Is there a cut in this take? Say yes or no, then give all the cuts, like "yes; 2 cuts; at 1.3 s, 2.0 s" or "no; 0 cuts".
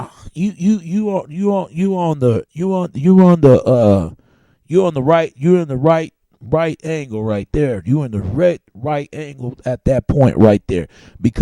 no; 0 cuts